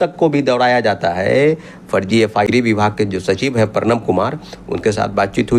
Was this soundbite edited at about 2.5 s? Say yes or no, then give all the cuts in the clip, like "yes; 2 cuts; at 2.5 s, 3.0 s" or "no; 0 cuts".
yes; 1 cut; at 2.5 s